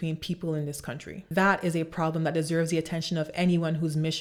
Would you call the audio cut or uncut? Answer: uncut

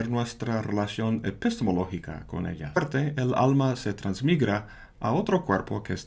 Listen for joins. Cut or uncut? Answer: uncut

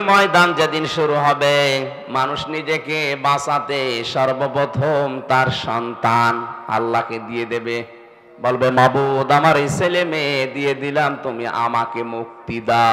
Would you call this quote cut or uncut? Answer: uncut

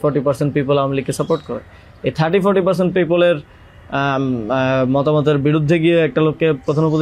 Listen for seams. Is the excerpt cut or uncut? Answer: uncut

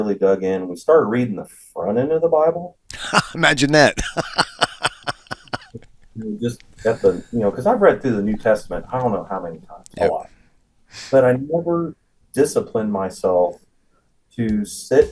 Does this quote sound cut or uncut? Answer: uncut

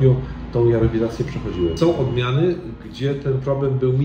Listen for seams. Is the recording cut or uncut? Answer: cut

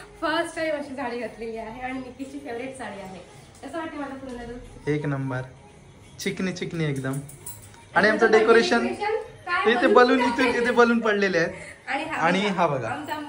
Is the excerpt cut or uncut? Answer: uncut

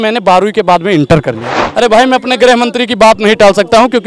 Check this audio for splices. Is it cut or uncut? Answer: cut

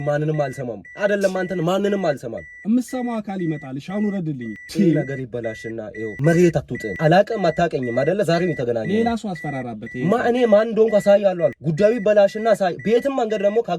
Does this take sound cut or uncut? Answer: cut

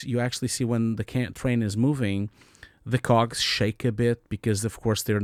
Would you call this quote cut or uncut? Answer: uncut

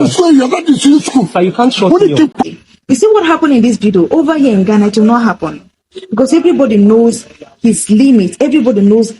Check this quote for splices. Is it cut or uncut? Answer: cut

